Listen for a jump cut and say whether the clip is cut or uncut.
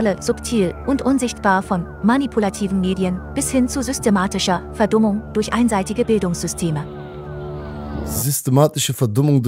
uncut